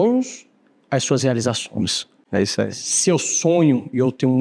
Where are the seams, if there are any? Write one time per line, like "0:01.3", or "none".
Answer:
0:02.1